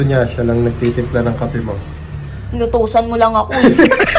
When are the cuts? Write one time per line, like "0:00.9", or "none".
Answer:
none